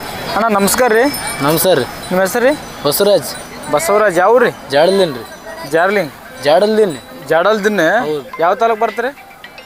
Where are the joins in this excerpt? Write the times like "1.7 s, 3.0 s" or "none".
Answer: none